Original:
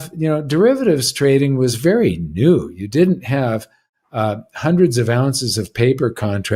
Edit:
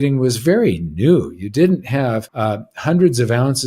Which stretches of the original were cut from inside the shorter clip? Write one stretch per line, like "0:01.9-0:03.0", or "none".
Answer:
0:03.7-0:04.1